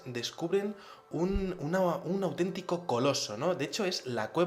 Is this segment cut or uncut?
uncut